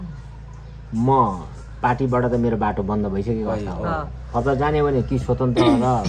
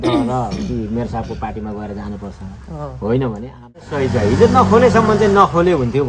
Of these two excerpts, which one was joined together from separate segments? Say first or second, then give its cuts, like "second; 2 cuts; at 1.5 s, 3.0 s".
second; 1 cut; at 3.7 s